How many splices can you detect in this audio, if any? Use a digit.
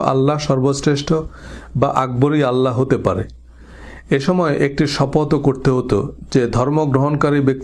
0